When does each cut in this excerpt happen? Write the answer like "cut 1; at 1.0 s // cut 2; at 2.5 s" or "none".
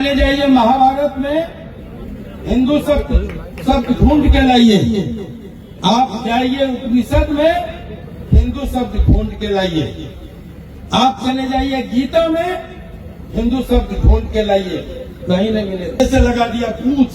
cut 1; at 16.0 s